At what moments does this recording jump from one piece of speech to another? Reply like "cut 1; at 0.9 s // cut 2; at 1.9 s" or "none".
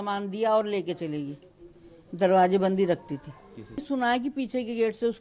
cut 1; at 3.8 s